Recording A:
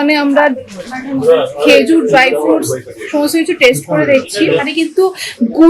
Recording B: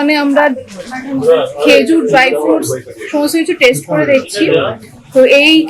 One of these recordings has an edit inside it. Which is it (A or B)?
A